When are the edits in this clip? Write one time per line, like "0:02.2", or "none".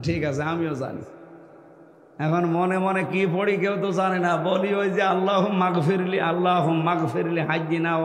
none